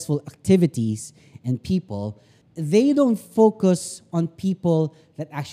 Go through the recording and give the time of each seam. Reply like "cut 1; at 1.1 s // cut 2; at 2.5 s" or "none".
none